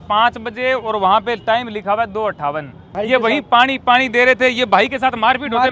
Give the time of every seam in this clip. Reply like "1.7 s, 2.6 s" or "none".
2.8 s

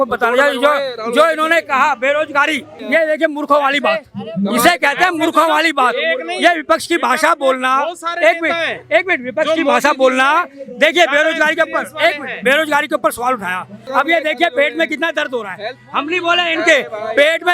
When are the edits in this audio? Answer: 2.8 s, 13.9 s

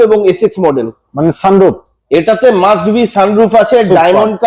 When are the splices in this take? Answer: none

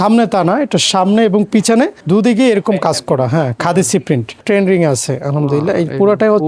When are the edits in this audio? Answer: 2.0 s, 4.4 s

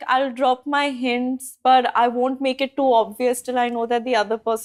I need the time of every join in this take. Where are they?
none

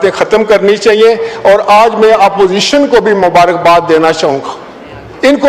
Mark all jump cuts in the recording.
none

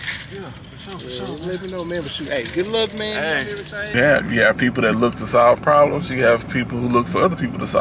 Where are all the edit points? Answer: 3.9 s

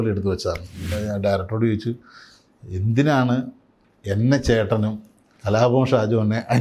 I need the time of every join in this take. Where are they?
0.9 s

